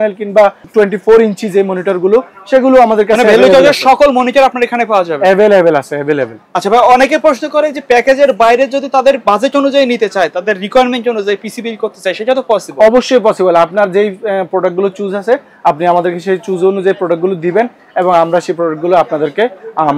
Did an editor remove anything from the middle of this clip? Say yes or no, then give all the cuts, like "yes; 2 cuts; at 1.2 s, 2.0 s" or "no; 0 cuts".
no; 0 cuts